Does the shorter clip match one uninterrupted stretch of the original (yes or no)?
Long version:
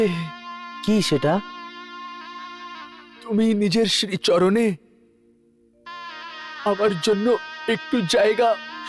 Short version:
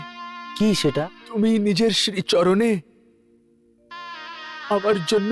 no